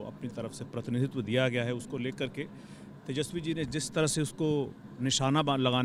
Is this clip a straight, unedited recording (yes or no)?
yes